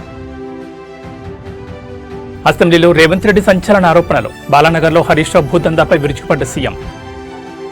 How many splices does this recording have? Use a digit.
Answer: 1